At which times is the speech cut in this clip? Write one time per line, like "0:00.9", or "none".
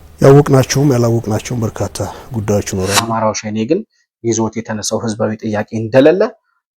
0:03.0

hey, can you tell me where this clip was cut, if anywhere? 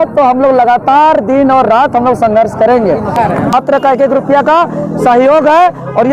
0:03.1

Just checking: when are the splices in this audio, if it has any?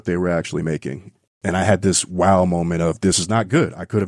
0:01.3
0:03.2

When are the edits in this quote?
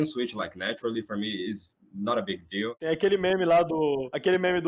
0:02.7

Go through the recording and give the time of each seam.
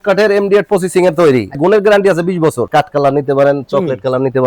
0:01.6
0:02.7

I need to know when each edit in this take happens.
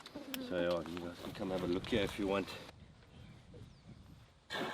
0:02.7

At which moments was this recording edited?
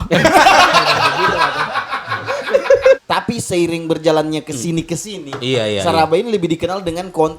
0:03.0

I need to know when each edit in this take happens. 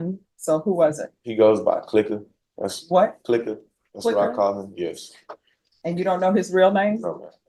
none

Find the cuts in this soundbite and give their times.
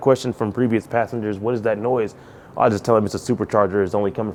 none

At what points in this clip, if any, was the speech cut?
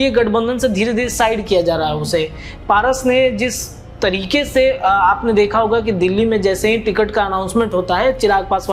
none

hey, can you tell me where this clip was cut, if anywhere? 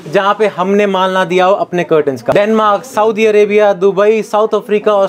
0:02.3

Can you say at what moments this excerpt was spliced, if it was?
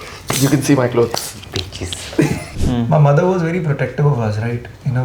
0:02.5

